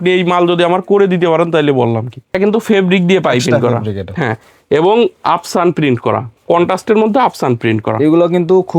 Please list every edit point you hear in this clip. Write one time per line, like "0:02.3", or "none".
0:02.3